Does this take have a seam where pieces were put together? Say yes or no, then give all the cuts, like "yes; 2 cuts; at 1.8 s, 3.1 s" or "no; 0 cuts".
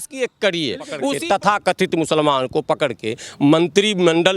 yes; 1 cut; at 1.1 s